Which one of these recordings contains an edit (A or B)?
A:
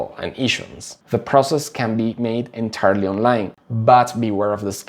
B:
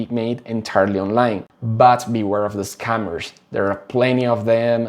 A